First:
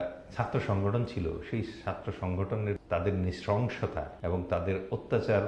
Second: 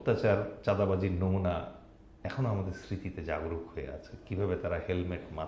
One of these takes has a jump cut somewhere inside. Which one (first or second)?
first